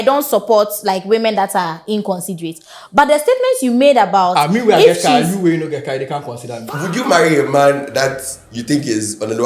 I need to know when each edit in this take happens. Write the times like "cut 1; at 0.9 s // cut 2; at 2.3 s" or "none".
cut 1; at 6.7 s